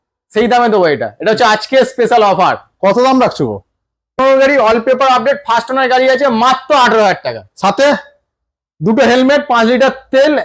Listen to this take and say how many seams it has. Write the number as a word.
one